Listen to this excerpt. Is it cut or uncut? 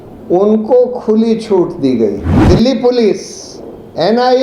cut